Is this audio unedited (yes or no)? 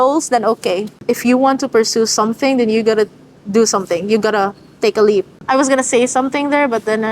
no